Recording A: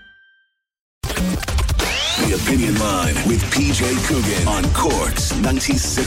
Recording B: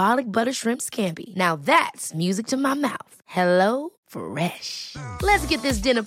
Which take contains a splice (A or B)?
A